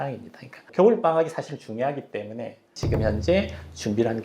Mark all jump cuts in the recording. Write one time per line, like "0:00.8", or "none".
0:02.6